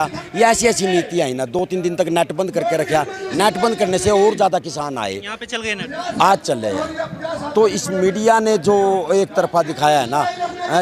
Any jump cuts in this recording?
no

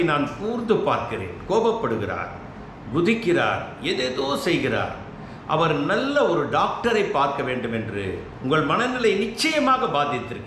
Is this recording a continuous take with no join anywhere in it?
no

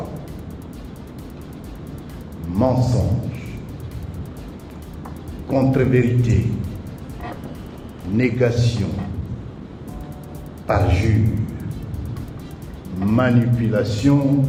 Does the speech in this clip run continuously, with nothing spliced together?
yes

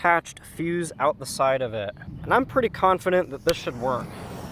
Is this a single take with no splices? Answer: yes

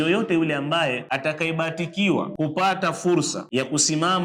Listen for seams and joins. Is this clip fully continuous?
no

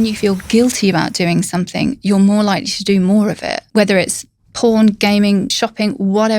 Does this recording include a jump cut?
yes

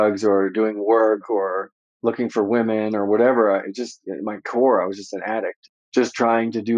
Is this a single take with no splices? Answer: no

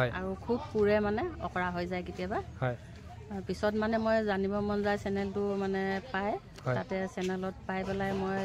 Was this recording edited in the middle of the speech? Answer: no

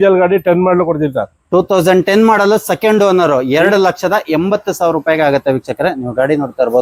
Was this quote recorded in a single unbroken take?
yes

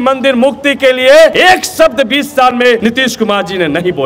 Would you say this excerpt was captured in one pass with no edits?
no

